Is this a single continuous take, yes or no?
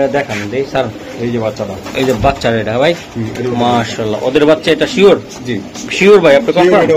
yes